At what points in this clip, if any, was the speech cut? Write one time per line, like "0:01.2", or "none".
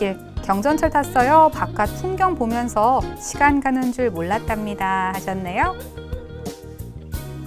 0:05.7